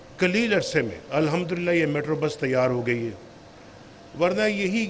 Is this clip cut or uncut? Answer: cut